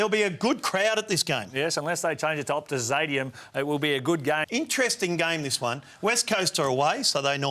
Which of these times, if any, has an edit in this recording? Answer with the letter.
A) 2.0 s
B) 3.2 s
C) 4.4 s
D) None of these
C